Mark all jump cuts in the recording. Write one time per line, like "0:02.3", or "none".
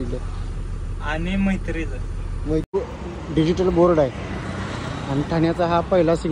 0:02.7